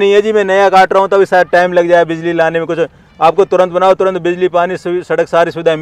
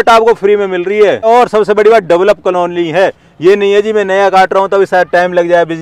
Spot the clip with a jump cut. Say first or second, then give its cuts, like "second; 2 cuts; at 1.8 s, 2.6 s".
second; 1 cut; at 1.3 s